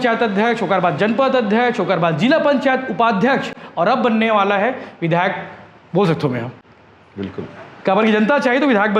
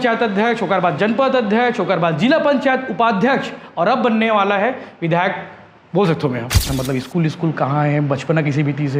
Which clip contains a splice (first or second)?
second